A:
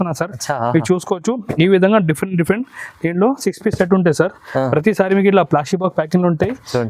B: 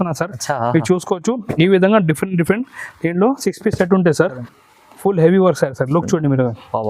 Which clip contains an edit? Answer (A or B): B